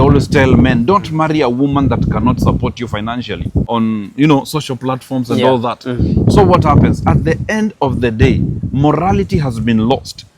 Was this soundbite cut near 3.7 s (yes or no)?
yes